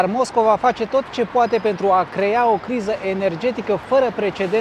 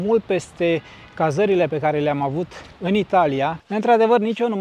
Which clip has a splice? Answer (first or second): second